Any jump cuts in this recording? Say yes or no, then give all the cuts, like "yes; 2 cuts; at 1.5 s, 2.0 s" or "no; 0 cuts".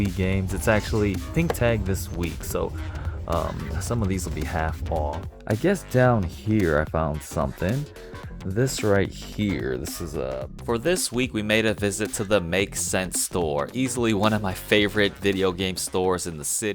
yes; 2 cuts; at 5.3 s, 10.3 s